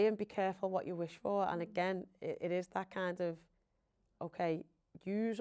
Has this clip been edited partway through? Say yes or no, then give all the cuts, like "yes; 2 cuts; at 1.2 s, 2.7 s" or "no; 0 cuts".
no; 0 cuts